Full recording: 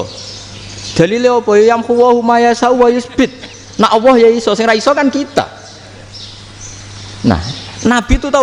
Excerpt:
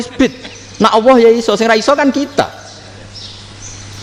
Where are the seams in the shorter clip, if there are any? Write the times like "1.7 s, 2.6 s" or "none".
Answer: none